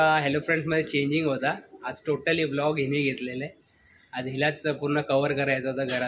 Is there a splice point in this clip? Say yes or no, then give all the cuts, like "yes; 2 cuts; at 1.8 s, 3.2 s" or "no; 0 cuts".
no; 0 cuts